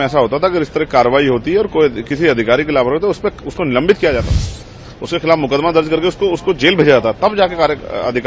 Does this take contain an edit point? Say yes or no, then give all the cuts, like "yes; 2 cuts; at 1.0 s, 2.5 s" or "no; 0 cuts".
no; 0 cuts